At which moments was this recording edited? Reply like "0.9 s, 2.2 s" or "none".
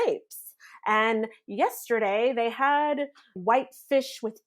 none